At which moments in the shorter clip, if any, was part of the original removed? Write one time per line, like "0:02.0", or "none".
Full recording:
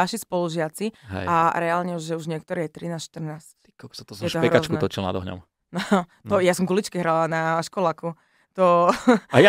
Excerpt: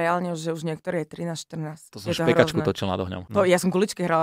0:01.9
0:03.2